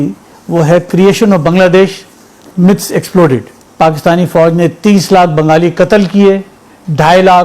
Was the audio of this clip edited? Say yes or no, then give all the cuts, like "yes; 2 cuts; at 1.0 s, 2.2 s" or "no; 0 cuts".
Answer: yes; 1 cut; at 3.6 s